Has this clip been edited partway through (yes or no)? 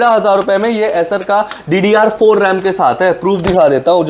no